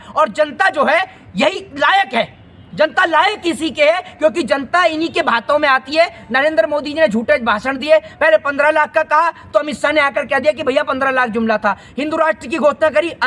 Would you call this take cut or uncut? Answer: uncut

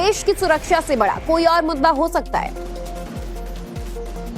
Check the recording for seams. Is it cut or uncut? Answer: cut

